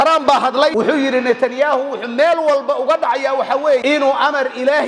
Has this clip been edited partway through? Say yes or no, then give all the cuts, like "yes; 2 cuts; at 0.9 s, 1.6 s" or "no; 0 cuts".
yes; 2 cuts; at 0.7 s, 3.8 s